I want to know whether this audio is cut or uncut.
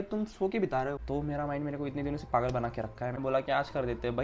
cut